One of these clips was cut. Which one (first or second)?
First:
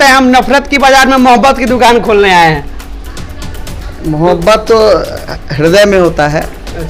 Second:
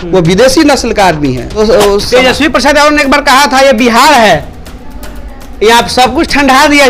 second